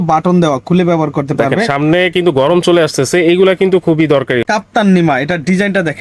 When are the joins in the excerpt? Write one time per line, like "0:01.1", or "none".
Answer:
0:04.4